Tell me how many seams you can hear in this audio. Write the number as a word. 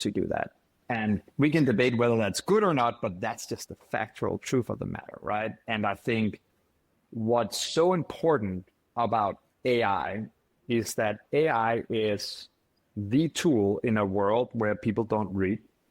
one